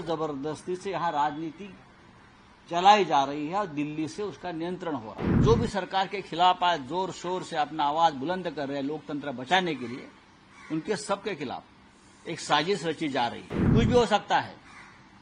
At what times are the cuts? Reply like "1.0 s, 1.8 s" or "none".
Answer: 5.4 s, 13.5 s